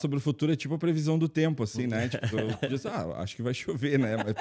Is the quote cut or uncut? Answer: uncut